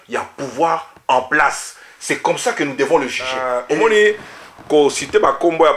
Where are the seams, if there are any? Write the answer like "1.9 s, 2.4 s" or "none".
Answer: 3.5 s